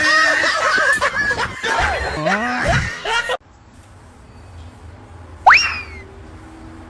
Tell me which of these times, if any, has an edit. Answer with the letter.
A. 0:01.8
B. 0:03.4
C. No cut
C